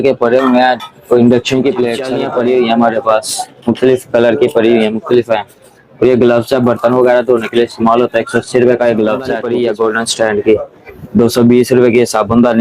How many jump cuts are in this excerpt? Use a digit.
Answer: 2